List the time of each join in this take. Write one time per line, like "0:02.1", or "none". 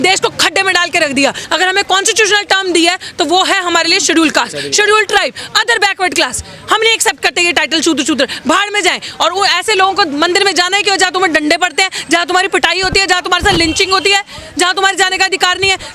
0:01.4